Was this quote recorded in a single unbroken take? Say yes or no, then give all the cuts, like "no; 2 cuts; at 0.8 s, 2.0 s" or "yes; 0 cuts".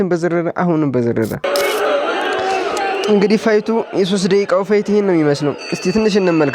no; 1 cut; at 1.4 s